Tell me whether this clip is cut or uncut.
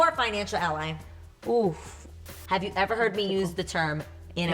cut